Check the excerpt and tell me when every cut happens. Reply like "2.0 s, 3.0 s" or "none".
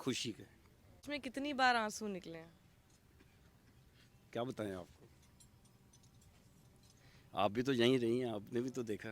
1.0 s